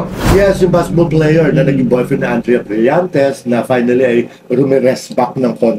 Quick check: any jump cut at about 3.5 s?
no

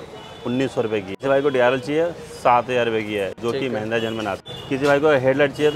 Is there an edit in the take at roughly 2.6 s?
no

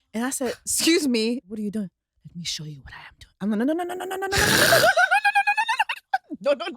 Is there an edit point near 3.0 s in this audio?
no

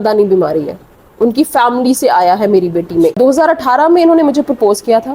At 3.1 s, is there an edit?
yes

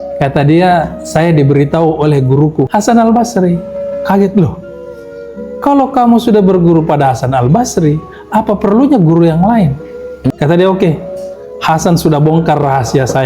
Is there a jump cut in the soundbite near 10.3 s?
yes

